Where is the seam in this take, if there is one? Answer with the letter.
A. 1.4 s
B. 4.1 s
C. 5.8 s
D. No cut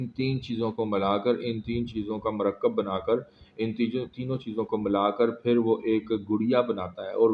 D